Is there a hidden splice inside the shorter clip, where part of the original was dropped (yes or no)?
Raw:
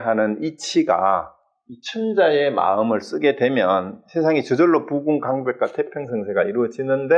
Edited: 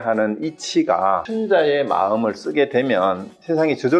yes